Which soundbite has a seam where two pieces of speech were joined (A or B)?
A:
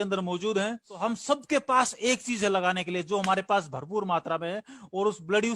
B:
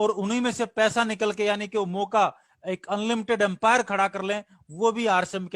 A